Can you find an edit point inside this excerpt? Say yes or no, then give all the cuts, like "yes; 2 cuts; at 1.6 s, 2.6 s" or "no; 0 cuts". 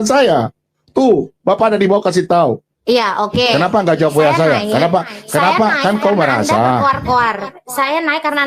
yes; 1 cut; at 2.7 s